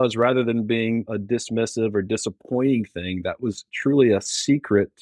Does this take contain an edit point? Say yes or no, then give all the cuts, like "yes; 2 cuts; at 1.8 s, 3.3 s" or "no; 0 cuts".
no; 0 cuts